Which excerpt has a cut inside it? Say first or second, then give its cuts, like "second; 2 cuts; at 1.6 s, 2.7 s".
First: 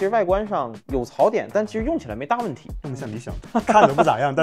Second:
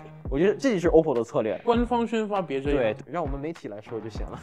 second; 2 cuts; at 1.6 s, 3.0 s